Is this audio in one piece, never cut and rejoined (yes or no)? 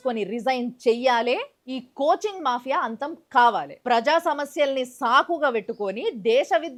yes